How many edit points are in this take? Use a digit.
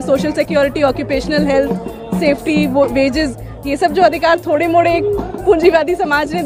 0